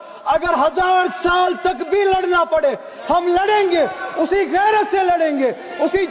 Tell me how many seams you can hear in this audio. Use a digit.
0